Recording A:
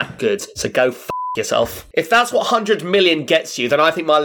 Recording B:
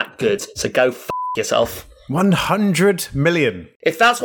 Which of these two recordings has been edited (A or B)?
A